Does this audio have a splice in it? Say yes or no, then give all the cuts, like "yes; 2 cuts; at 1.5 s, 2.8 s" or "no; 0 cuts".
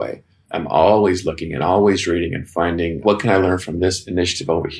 no; 0 cuts